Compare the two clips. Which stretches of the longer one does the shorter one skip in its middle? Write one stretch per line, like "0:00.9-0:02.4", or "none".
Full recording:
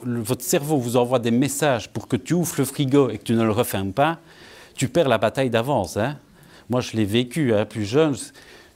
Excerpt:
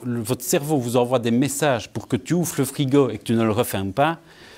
none